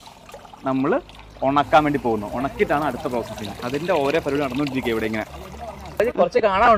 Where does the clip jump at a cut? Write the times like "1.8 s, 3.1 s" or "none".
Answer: none